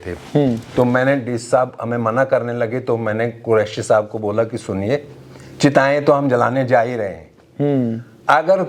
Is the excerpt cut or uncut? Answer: uncut